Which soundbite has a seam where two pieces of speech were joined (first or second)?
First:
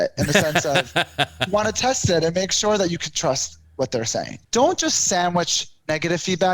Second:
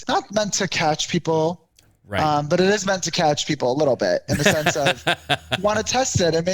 first